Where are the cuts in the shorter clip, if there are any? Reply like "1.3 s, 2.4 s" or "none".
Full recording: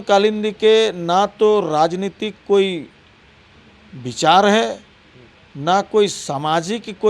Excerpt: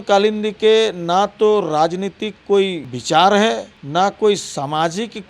2.9 s, 3.7 s

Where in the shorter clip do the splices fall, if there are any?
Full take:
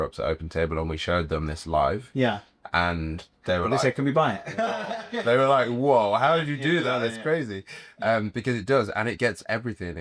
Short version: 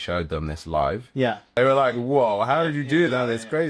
1.6 s

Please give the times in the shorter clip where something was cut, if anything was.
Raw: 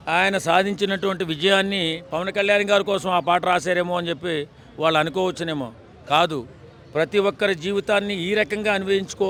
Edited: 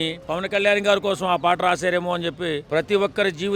2.6 s

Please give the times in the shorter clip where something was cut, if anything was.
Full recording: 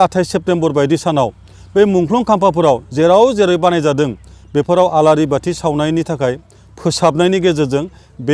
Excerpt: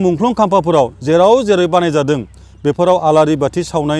none

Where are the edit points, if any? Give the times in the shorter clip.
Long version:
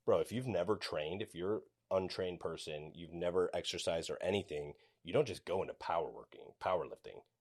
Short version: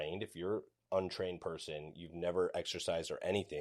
none

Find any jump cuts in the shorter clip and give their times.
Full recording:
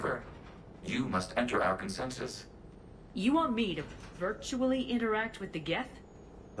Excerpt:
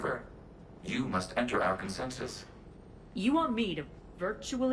none

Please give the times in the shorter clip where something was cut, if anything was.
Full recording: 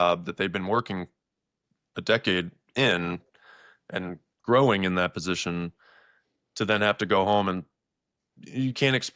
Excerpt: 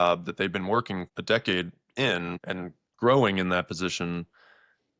1.1 s, 2.4 s

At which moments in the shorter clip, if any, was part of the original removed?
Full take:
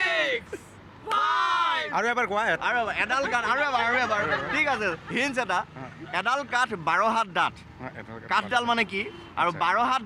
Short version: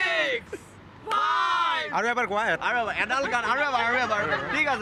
none

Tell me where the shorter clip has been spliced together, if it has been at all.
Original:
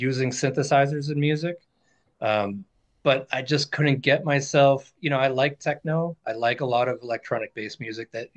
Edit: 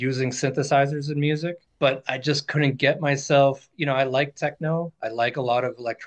1.6 s

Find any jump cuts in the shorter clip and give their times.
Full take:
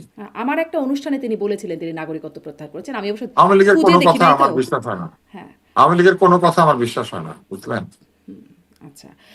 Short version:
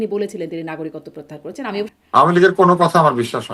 1.9 s

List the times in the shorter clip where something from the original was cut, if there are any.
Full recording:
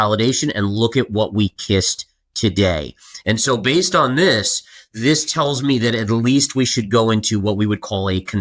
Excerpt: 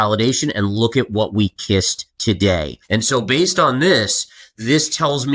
2.0 s, 2.8 s

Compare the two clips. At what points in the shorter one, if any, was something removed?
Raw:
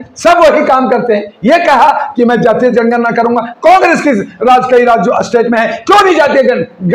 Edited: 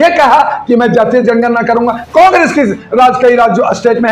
none

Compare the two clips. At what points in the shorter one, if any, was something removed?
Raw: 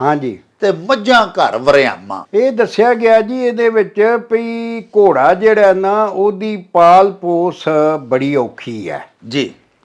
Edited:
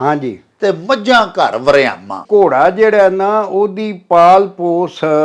2.1 s

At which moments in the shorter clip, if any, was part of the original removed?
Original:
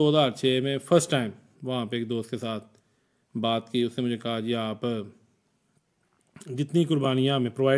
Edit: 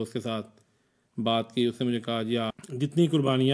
2.5 s

